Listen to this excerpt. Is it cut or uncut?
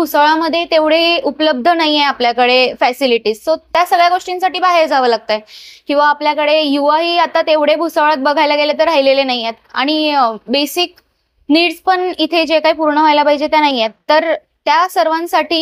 uncut